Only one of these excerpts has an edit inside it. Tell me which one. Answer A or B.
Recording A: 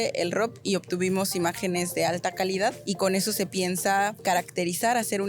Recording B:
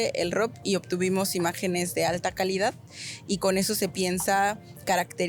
A